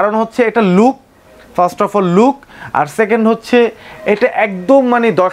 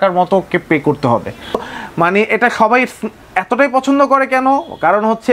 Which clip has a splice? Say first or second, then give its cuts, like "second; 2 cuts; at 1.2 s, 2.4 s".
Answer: second; 1 cut; at 1.5 s